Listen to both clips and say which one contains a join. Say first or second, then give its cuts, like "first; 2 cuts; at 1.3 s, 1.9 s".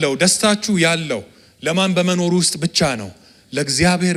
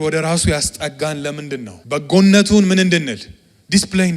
second; 1 cut; at 1.7 s